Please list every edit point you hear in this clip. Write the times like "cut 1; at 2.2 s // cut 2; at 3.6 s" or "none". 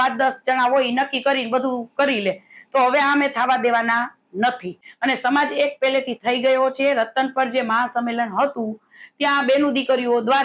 cut 1; at 4.8 s